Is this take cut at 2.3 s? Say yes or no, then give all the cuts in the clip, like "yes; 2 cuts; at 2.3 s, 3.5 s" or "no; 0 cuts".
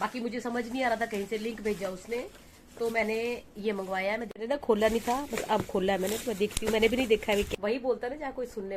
no; 2 cuts; at 4.3 s, 7.5 s